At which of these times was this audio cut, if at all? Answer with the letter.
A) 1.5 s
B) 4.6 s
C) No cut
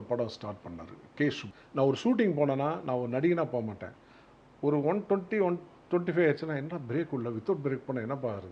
A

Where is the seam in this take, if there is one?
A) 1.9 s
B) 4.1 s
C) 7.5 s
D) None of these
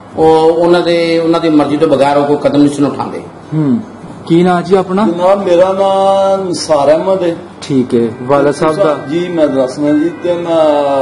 B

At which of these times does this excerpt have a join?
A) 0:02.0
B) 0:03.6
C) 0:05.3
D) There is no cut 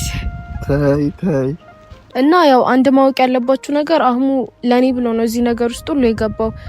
A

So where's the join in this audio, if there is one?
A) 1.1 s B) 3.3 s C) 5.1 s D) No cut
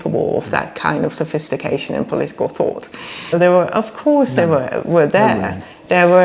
B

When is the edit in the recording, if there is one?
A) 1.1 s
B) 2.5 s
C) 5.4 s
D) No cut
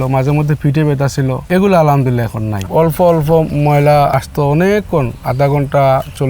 B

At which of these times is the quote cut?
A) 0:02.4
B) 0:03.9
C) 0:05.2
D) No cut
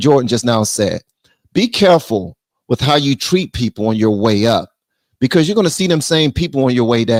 D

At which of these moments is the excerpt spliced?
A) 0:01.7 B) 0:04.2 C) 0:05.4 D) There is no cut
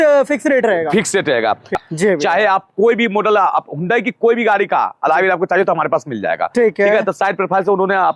A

